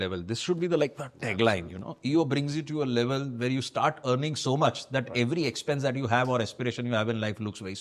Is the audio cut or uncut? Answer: uncut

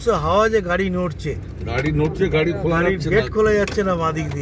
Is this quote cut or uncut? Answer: uncut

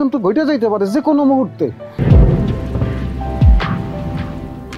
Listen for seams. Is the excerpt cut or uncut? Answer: cut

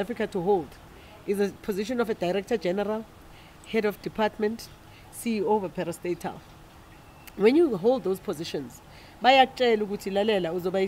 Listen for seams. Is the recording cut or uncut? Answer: uncut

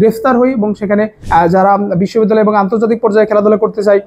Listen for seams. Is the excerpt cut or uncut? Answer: cut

